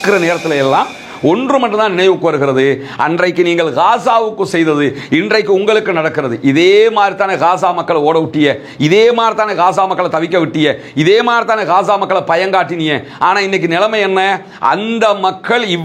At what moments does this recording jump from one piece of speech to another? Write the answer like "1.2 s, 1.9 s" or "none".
none